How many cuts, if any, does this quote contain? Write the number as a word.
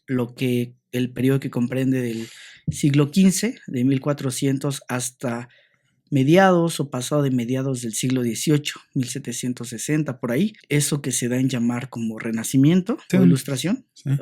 one